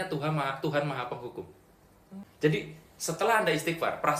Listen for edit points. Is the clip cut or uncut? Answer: cut